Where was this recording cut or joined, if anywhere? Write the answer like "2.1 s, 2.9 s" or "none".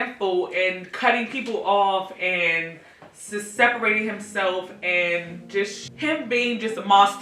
5.8 s